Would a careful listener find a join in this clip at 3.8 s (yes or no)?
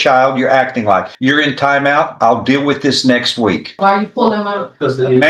yes